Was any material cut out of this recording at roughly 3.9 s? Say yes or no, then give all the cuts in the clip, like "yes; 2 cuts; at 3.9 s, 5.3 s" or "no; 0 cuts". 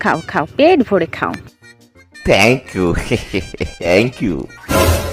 yes; 1 cut; at 3.9 s